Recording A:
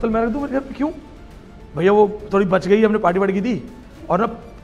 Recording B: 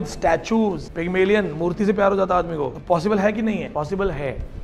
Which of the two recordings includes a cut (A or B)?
B